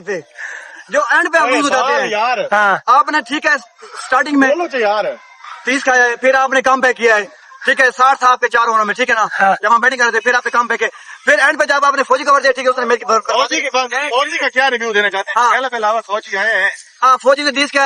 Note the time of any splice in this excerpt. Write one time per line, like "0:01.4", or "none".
none